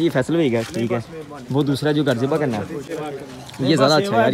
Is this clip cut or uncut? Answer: uncut